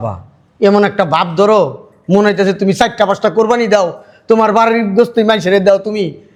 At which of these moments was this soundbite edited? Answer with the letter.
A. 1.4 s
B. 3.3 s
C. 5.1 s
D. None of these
D